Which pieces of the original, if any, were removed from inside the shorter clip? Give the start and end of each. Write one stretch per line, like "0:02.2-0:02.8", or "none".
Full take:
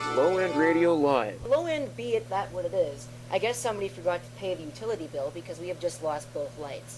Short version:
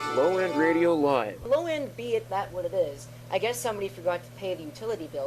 none